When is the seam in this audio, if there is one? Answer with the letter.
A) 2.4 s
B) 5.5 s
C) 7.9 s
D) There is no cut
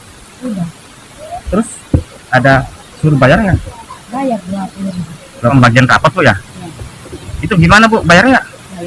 B